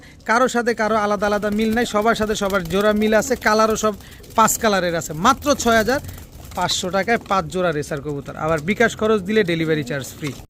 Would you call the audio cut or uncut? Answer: uncut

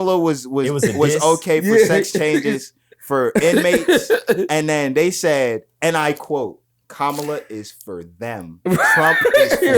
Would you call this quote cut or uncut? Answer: uncut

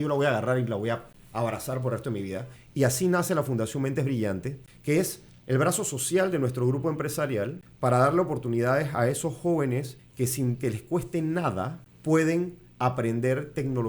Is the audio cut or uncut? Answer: cut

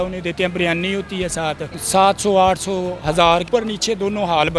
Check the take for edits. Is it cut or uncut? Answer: cut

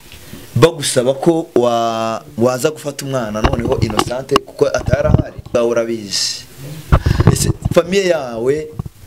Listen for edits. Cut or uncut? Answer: cut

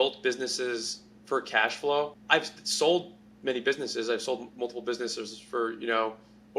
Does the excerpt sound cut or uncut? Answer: cut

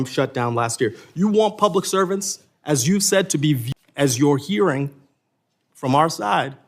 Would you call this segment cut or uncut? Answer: cut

